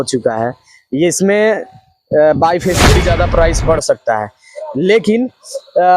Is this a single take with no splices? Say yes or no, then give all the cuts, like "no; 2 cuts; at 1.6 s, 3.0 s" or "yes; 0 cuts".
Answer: no; 1 cut; at 2.9 s